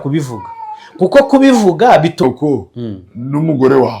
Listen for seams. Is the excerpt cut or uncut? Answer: cut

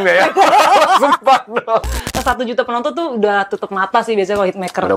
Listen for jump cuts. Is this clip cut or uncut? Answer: cut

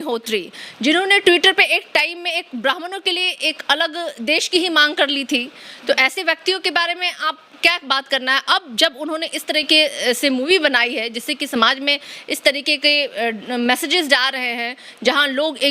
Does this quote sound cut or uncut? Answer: uncut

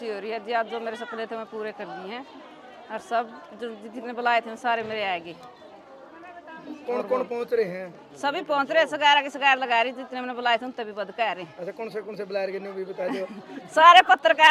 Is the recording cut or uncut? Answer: uncut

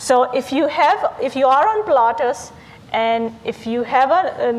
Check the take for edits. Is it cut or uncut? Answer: cut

